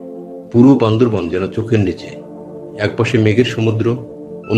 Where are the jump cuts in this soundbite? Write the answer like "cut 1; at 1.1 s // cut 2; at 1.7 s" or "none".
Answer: none